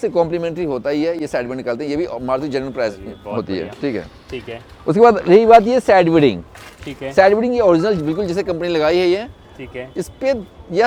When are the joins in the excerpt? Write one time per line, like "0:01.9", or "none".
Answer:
none